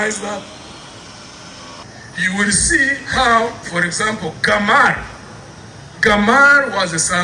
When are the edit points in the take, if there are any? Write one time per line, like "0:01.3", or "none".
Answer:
0:01.8